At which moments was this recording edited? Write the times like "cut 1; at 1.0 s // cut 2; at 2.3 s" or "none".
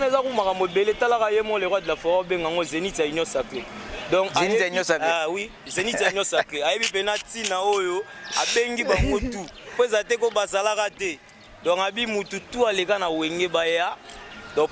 none